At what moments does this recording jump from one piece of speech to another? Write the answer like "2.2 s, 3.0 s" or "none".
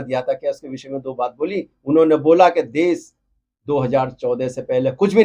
none